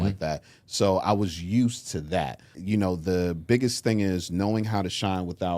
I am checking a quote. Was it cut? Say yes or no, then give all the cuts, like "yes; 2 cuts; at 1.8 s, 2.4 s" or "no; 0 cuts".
yes; 1 cut; at 2.5 s